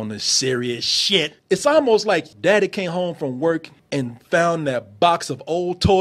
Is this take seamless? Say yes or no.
no